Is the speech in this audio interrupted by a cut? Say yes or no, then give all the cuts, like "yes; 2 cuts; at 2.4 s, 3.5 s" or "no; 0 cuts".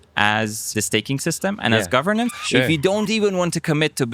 yes; 2 cuts; at 0.7 s, 2.3 s